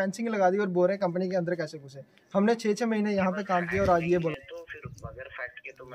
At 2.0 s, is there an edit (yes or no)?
no